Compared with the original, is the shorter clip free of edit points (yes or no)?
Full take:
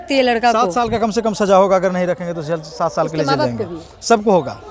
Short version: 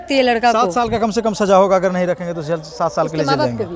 yes